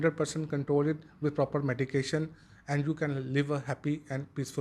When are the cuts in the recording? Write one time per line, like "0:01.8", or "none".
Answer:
none

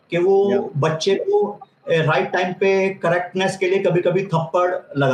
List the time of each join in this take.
none

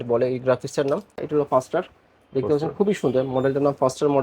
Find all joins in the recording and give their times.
0:01.2

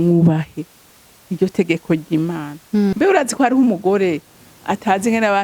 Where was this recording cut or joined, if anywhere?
0:02.9

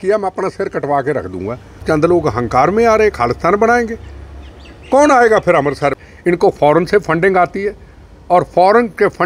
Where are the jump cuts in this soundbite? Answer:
0:01.8
0:06.0

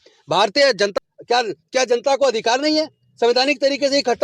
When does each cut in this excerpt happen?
0:00.9

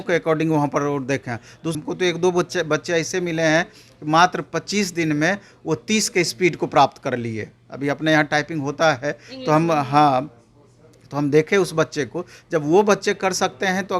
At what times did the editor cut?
0:01.7

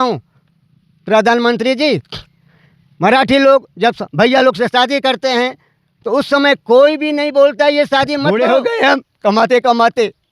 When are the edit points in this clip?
0:08.3

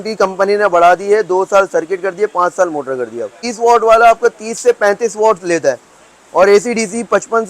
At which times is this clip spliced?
0:03.4

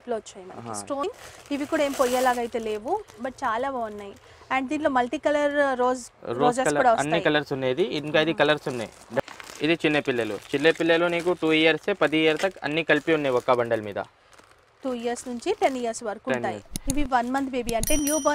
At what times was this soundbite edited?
0:01.0
0:09.2
0:16.7

